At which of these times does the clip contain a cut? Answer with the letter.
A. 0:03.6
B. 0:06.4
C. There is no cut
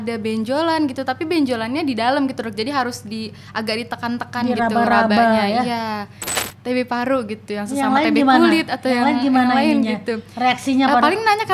B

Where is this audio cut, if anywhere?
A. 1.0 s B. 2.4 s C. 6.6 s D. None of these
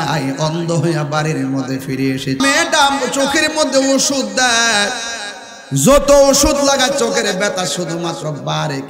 B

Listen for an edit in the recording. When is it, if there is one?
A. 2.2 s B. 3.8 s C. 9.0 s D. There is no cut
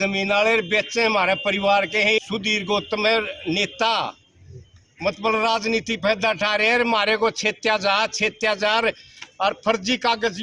A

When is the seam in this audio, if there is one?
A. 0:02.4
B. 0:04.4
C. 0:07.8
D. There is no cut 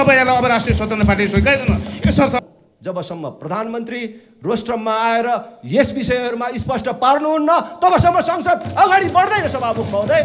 A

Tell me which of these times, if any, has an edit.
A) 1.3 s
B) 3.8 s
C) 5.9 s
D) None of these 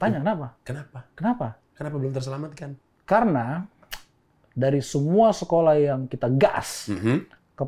D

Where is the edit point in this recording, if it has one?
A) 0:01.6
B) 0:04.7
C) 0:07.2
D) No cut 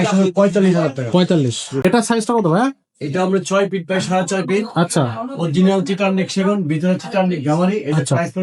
A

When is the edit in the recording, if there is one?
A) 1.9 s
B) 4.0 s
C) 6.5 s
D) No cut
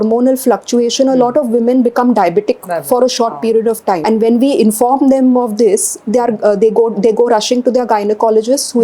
B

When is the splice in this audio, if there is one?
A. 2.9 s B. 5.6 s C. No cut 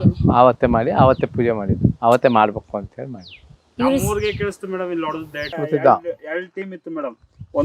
B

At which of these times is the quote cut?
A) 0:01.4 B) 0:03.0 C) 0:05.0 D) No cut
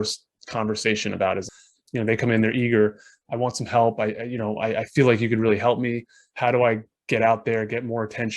A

